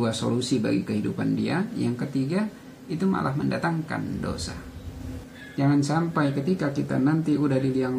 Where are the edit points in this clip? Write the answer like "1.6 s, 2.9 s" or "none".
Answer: 5.2 s